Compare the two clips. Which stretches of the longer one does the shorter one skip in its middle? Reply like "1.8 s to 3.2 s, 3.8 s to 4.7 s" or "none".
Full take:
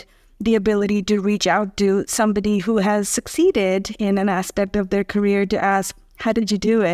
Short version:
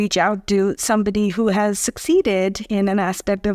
none